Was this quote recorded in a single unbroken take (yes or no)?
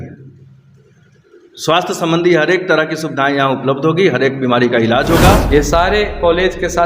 no